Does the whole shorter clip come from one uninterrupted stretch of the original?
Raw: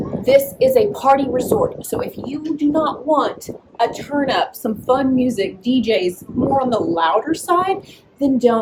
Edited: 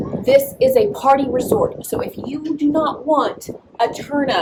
yes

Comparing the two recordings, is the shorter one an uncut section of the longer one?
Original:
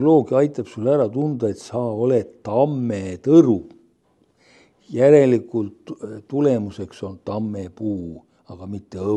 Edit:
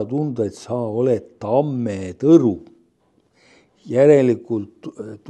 yes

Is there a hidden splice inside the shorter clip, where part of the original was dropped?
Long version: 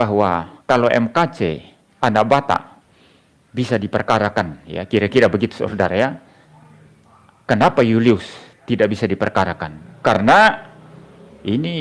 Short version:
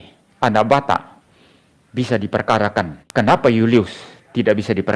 yes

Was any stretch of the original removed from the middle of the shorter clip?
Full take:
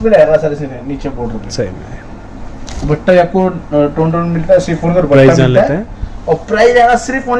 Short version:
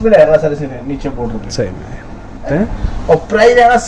yes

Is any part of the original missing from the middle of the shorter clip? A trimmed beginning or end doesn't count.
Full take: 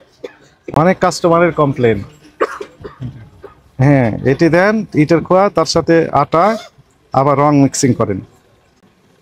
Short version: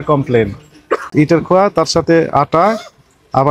yes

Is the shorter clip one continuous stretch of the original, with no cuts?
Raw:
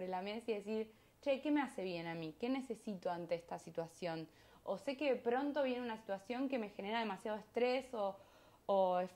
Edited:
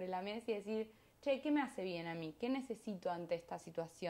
yes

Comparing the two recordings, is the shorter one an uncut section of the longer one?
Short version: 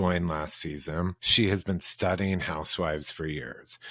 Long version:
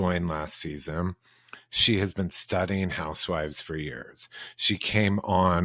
no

